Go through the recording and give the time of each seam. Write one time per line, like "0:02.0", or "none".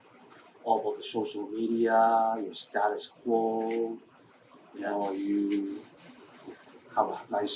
none